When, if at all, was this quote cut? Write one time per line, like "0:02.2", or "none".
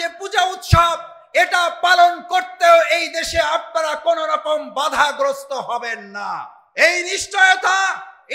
0:06.6